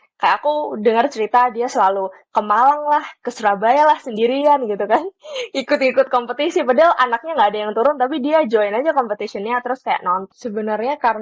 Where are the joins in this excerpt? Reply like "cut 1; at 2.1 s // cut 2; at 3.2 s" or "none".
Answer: cut 1; at 10.2 s